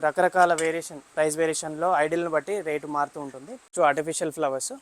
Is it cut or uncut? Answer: cut